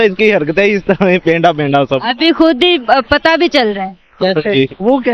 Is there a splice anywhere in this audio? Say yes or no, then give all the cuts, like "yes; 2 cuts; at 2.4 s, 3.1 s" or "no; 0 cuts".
no; 0 cuts